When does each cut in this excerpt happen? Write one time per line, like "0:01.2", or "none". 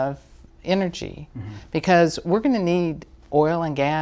none